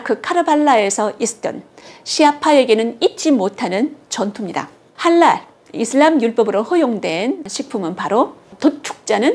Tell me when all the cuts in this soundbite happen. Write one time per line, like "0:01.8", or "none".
0:04.8

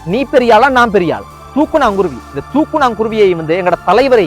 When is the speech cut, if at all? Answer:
0:01.4

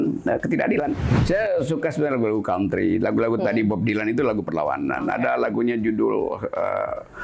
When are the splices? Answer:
0:01.1

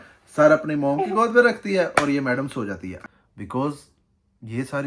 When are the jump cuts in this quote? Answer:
0:02.9

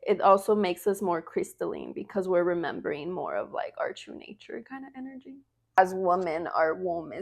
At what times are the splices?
0:05.8

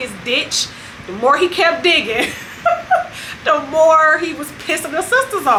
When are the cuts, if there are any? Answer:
none

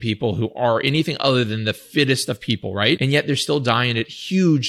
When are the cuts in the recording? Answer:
0:03.0

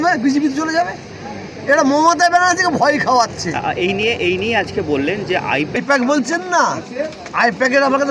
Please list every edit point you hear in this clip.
none

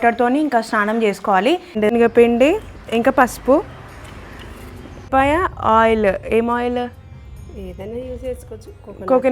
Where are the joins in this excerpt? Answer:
0:01.8

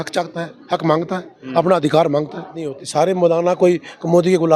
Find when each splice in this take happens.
0:02.8

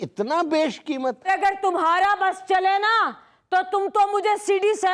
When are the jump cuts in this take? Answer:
0:01.3

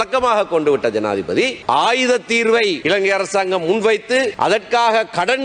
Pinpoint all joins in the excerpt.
0:01.6
0:02.8
0:04.3

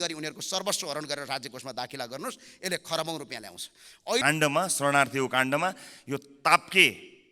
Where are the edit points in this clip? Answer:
0:04.2

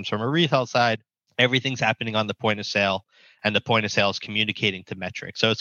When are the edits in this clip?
0:01.2

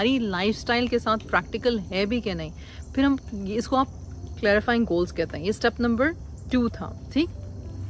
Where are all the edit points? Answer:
none

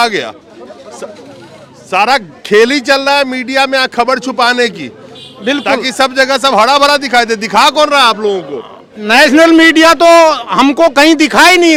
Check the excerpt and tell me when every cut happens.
none

